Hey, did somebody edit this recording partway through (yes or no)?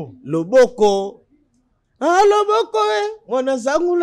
no